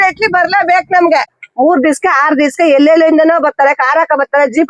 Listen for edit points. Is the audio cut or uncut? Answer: cut